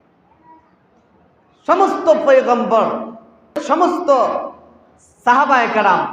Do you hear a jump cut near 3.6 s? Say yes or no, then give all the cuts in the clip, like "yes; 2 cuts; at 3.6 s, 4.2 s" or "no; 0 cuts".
yes; 1 cut; at 3.6 s